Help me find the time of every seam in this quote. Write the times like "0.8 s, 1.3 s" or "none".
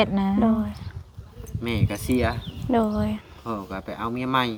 none